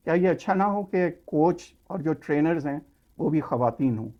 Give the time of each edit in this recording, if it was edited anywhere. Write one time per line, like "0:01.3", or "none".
none